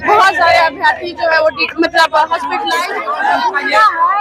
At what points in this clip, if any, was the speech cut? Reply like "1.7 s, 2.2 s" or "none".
2.8 s